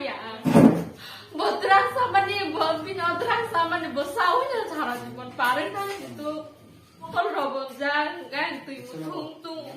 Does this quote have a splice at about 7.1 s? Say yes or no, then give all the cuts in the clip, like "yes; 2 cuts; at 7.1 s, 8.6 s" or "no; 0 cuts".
yes; 1 cut; at 7.1 s